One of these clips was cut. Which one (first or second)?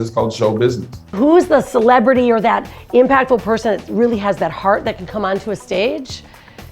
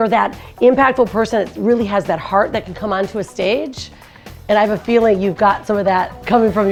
first